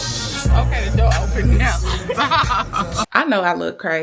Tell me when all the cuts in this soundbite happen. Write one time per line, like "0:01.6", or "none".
0:03.1